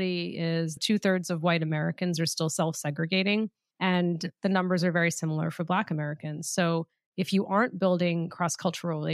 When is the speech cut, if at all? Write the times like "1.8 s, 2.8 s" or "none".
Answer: 0.8 s, 3.6 s